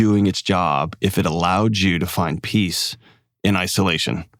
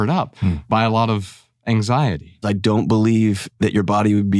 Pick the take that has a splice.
second; 1 cut; at 2.4 s

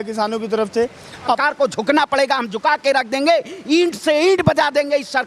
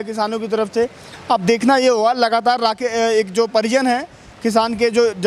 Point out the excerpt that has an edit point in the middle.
first; 1 cut; at 1.3 s

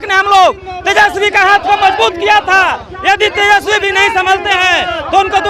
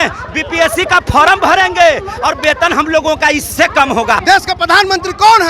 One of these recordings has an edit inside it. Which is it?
second; 1 cut; at 4.2 s

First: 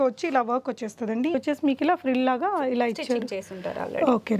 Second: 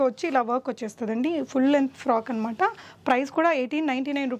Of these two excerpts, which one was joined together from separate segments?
first; 1 cut; at 1.3 s

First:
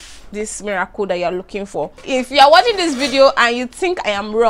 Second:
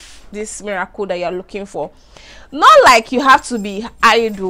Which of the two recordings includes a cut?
first; 1 cut; at 2.0 s

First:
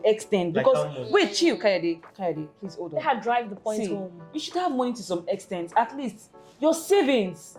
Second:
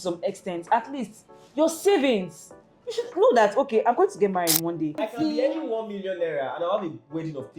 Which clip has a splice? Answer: second; 1 cut; at 5.0 s

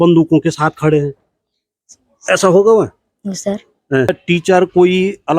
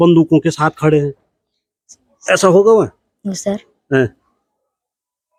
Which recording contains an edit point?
first; 1 cut; at 4.1 s

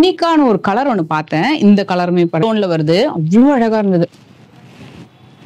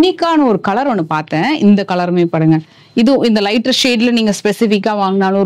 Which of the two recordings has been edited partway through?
first; 1 cut; at 2.4 s

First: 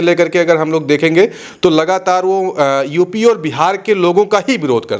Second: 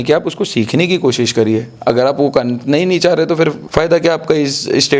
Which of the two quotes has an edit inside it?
second; 1 cut; at 3.6 s

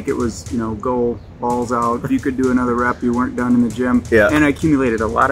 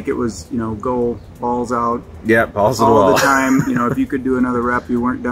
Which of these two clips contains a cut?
first; 2 cuts; at 2.0 s, 4.4 s

